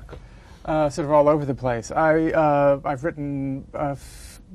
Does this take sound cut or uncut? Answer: uncut